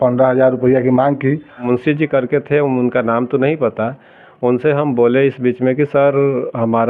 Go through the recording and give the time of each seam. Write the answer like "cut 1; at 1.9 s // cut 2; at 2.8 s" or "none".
cut 1; at 1.6 s